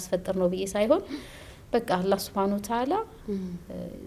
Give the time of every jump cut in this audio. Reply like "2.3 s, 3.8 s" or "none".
none